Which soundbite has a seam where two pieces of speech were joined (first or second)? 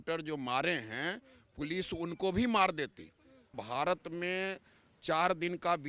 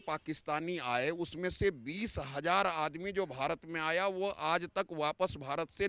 first